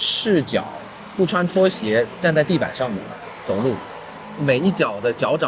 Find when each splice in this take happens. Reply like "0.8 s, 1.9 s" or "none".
none